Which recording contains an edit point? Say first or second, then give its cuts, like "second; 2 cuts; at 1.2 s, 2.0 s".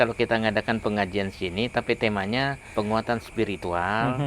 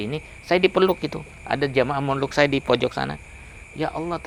first; 1 cut; at 2.6 s